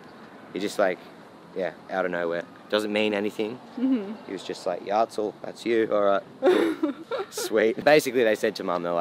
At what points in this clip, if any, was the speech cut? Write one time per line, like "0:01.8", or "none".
0:07.8

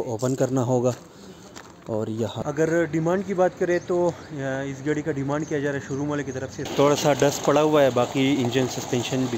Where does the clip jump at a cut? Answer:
0:02.4
0:06.7

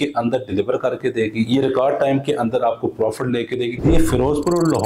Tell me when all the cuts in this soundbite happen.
0:03.7

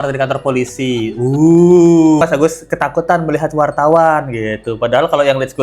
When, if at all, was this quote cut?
0:02.2

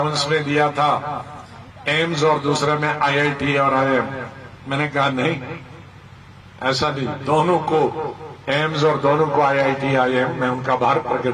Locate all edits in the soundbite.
none

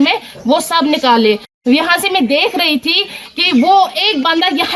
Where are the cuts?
0:01.5

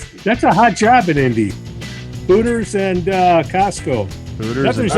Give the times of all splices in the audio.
none

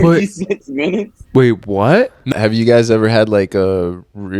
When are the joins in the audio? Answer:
0:02.3

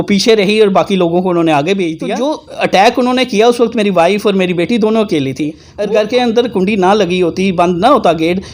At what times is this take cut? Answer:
0:02.1
0:05.7

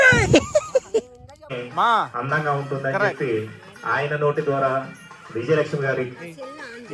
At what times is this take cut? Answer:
0:01.4

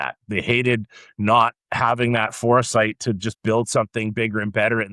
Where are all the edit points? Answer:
none

